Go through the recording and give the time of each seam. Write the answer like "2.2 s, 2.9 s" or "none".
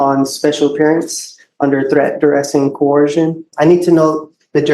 3.5 s